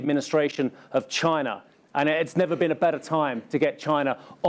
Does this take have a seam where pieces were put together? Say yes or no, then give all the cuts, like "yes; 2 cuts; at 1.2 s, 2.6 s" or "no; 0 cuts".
no; 0 cuts